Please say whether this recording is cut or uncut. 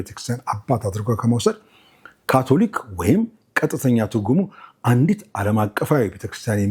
uncut